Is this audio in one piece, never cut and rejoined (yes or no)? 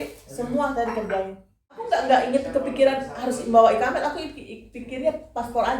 no